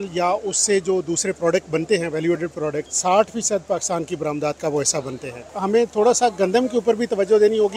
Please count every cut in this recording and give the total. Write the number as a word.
two